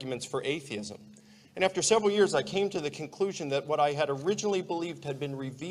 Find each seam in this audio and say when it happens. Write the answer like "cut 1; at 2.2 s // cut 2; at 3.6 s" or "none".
cut 1; at 2.1 s